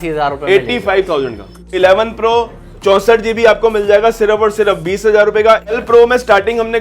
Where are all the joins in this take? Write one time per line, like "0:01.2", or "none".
0:01.7
0:05.7